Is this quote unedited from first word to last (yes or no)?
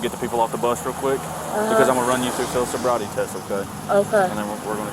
yes